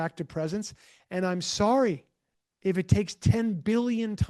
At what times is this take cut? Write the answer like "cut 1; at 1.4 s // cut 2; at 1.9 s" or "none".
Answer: none